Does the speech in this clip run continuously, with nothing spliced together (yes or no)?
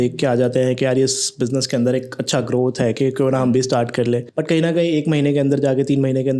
yes